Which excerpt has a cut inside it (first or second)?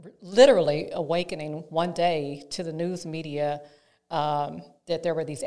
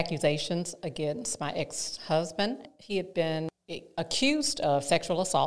second